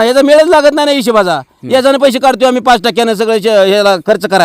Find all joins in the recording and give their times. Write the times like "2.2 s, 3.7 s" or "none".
none